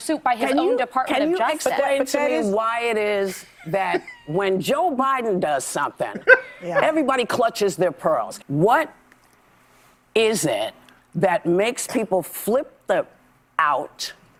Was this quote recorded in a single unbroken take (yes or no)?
yes